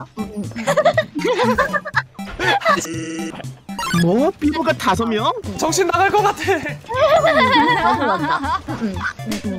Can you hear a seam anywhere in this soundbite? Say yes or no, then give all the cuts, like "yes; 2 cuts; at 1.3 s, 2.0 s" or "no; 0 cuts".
no; 0 cuts